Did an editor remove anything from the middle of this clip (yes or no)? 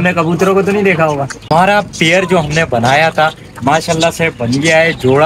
yes